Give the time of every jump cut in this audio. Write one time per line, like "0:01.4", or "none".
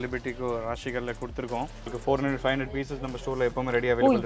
0:01.9